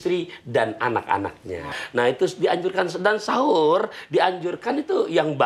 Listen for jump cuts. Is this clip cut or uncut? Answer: cut